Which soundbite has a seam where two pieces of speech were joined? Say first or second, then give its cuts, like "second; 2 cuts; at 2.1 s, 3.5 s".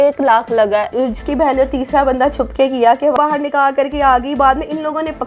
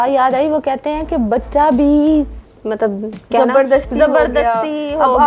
first; 2 cuts; at 0.9 s, 3.2 s